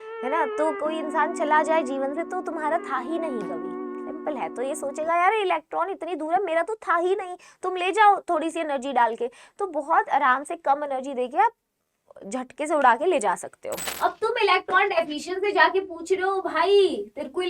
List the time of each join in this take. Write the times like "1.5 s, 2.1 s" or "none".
13.8 s